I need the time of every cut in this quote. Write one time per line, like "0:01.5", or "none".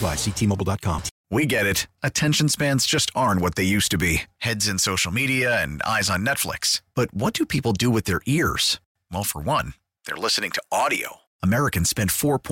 0:01.1